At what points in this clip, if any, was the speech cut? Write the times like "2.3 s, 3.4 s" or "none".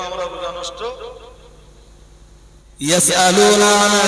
2.6 s